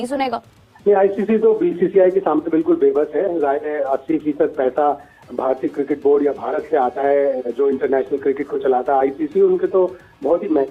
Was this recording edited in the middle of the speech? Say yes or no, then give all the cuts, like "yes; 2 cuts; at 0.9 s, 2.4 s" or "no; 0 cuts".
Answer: no; 0 cuts